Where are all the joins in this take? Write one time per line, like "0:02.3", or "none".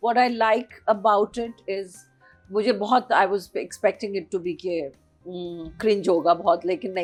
none